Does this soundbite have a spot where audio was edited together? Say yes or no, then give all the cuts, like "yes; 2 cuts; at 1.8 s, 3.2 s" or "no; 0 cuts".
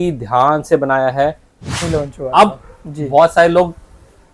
yes; 1 cut; at 1.7 s